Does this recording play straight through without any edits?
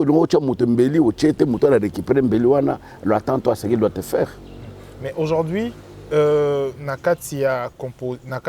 yes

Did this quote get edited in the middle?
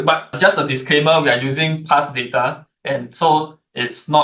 no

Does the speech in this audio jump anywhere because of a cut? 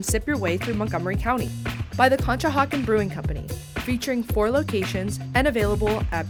no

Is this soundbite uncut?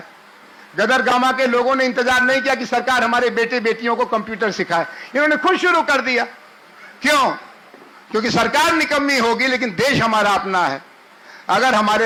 yes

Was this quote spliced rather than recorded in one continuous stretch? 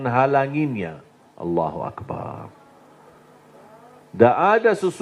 no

